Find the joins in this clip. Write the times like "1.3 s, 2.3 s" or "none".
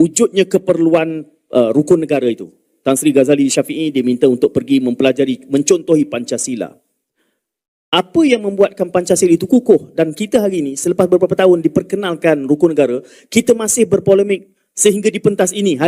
none